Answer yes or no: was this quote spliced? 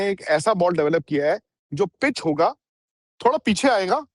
no